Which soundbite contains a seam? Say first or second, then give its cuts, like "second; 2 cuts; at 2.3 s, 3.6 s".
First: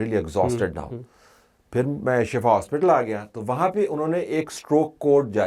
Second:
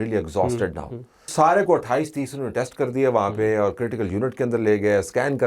second; 1 cut; at 1.3 s